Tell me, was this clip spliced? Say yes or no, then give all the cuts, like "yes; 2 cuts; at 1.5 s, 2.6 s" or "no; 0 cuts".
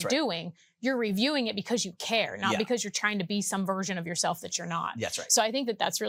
no; 0 cuts